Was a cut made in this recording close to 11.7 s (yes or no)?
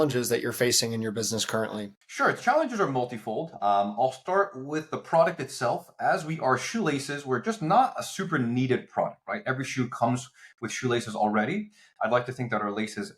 no